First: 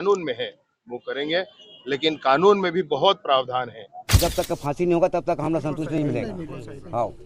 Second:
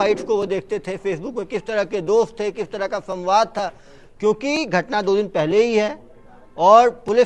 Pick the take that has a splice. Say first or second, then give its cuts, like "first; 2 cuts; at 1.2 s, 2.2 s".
first; 1 cut; at 4.2 s